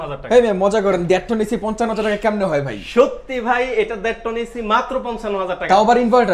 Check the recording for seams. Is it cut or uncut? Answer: uncut